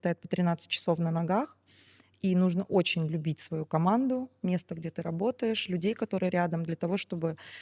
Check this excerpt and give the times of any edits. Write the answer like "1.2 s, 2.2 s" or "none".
none